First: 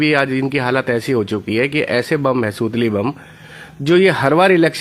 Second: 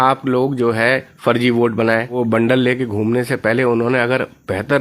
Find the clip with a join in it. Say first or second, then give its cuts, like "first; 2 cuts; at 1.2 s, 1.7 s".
second; 1 cut; at 2.2 s